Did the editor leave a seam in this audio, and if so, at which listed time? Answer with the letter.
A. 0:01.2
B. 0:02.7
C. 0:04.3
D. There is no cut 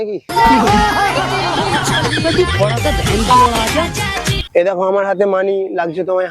C